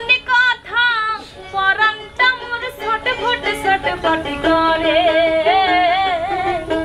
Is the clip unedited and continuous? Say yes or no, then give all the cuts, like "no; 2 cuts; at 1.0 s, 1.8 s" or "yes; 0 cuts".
yes; 0 cuts